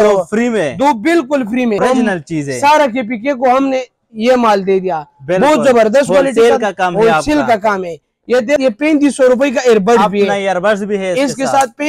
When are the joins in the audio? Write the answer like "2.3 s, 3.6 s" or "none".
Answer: 1.8 s, 8.6 s